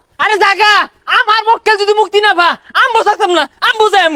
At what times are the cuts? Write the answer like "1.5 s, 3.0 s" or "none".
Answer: none